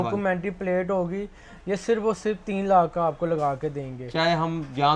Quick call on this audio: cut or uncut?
uncut